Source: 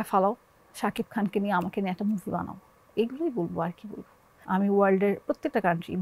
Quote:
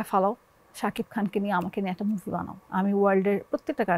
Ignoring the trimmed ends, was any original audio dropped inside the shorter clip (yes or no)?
yes